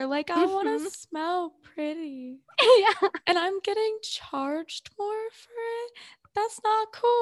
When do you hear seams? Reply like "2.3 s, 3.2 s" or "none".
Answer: none